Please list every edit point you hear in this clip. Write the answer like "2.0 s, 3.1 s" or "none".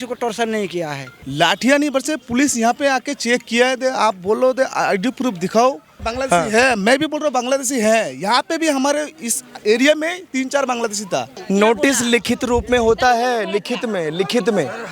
1.1 s, 6.0 s, 11.4 s